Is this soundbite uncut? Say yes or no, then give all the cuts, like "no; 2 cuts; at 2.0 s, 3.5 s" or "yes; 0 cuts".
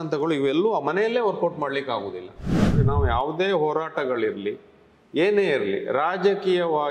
no; 1 cut; at 2.7 s